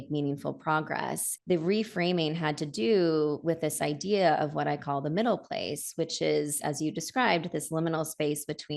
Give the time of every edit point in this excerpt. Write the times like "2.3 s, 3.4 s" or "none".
1.3 s